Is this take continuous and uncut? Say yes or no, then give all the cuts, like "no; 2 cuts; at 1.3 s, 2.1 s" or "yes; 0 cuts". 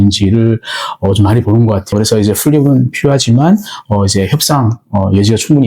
no; 1 cut; at 1.9 s